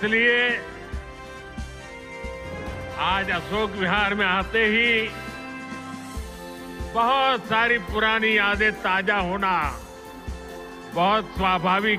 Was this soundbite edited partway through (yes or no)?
no